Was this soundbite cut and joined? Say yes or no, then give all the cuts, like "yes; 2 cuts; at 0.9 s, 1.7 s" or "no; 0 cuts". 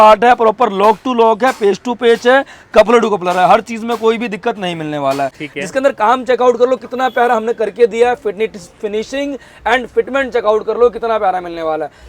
yes; 1 cut; at 5.4 s